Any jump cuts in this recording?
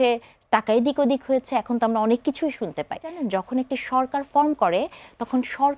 yes; 1 cut; at 3.1 s

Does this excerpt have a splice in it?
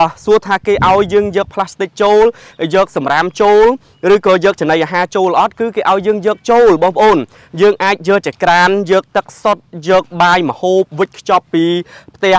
no; 0 cuts

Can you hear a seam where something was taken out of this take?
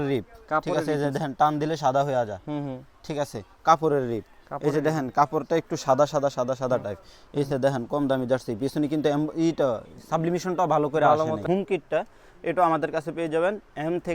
yes; 1 cut; at 11.4 s

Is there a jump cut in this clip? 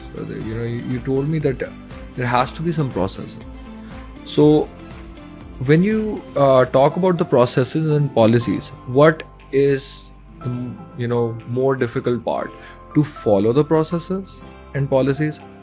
no; 0 cuts

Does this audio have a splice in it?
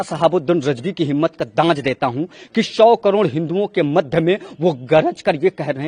no; 0 cuts

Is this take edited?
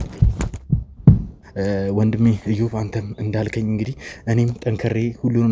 yes; 1 cut; at 1.4 s

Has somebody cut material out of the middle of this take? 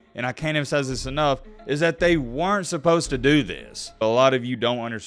yes; 1 cut; at 4.0 s

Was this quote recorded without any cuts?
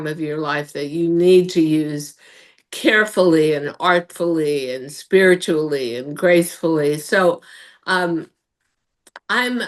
yes; 0 cuts

